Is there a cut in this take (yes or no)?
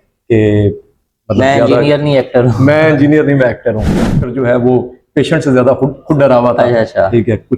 yes